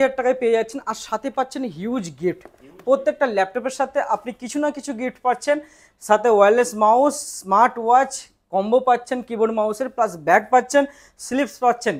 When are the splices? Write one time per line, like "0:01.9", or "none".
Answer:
none